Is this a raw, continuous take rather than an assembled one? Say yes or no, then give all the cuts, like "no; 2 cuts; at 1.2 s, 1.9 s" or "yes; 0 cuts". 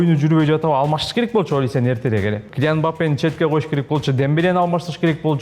no; 1 cut; at 2.5 s